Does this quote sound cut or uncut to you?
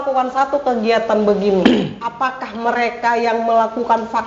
uncut